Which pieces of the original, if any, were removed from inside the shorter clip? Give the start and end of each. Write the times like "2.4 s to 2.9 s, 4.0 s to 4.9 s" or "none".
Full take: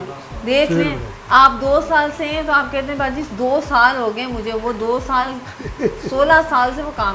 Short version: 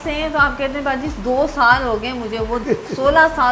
4.8 s to 5.8 s